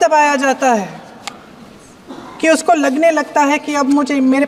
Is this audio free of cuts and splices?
yes; 0 cuts

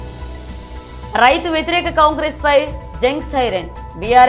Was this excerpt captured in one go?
no; 1 cut; at 1.1 s

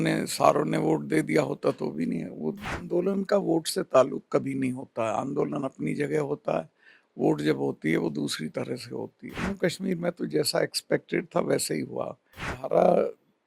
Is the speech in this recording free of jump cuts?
no; 3 cuts; at 2.7 s, 9.4 s, 12.5 s

